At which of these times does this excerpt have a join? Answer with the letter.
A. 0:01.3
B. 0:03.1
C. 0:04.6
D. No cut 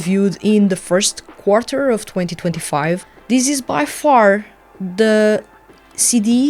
B